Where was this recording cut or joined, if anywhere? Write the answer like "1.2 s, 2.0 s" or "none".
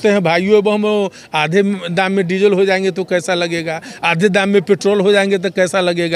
none